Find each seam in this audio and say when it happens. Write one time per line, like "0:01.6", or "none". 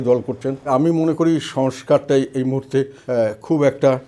0:00.7
0:03.0